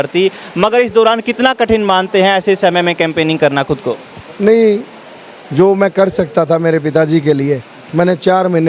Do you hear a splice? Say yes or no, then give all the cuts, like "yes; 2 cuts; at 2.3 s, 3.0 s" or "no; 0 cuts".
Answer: no; 0 cuts